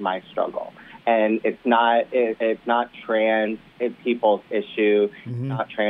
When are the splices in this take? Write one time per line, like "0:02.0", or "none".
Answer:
none

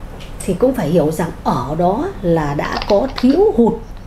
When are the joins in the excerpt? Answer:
none

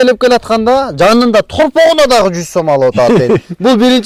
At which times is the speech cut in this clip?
none

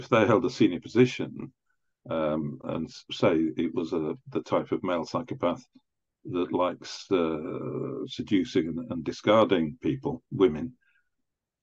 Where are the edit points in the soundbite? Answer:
none

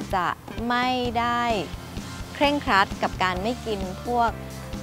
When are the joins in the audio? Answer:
none

